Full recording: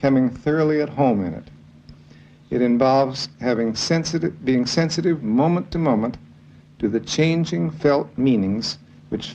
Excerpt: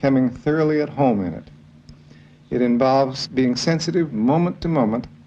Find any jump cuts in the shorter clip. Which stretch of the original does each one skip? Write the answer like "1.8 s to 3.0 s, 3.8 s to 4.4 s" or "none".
3.2 s to 4.3 s